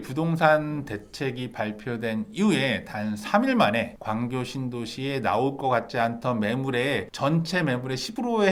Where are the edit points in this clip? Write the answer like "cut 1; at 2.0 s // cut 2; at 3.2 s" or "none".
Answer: none

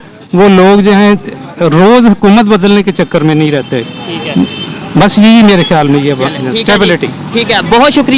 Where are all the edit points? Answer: none

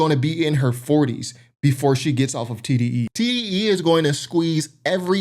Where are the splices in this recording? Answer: cut 1; at 3.1 s

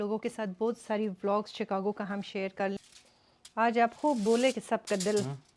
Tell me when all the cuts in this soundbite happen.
cut 1; at 2.8 s

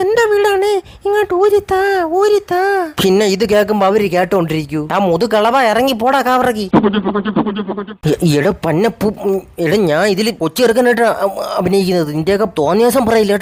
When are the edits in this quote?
none

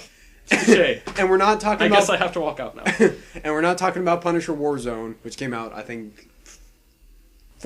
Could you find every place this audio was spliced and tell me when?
cut 1; at 5.0 s

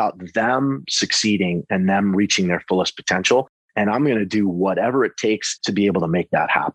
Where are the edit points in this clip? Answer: cut 1; at 5.5 s

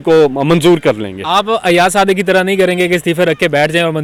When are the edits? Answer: none

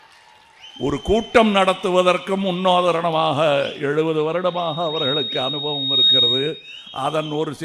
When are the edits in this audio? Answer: none

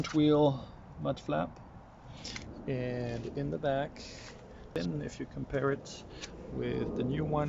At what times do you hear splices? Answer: cut 1; at 4.7 s

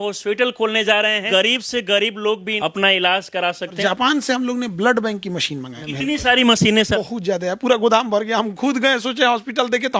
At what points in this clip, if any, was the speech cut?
cut 1; at 1.2 s // cut 2; at 2.5 s // cut 3; at 3.8 s // cut 4; at 5.8 s // cut 5; at 7.0 s

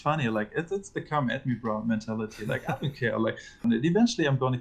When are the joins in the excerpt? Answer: cut 1; at 3.5 s

